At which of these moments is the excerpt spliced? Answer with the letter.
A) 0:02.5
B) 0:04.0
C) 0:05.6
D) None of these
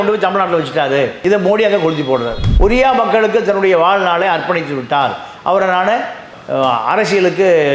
A